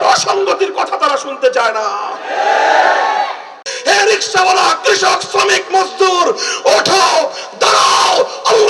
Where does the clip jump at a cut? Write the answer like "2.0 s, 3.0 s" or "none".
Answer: 3.6 s